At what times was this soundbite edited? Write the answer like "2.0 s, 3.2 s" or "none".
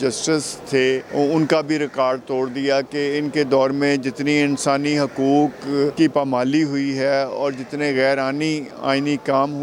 1.1 s, 5.9 s